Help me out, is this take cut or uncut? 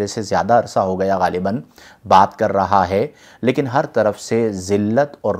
uncut